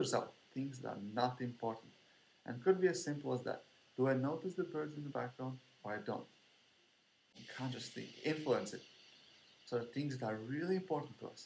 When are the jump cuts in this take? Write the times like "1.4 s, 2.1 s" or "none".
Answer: 7.4 s